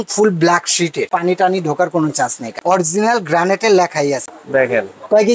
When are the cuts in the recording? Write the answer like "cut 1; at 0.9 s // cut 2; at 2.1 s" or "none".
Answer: cut 1; at 1.0 s // cut 2; at 2.5 s // cut 3; at 4.2 s